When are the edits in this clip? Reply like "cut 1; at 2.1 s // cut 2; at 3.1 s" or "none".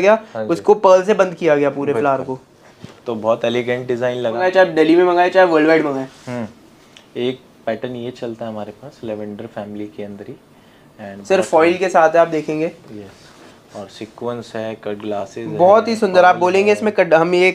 cut 1; at 4.4 s